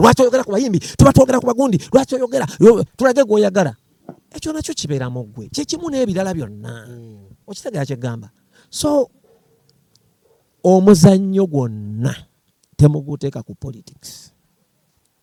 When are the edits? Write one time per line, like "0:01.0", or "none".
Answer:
none